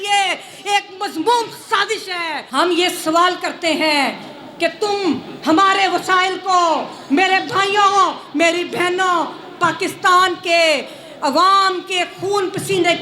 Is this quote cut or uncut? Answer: cut